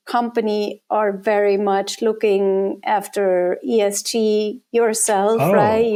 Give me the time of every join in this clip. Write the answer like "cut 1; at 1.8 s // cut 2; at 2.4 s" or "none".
none